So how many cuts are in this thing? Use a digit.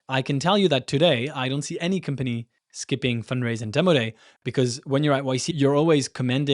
1